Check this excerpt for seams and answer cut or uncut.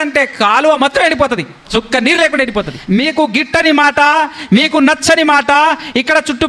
cut